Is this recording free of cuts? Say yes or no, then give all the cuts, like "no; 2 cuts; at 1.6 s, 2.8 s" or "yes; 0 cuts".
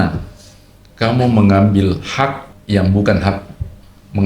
no; 1 cut; at 2.5 s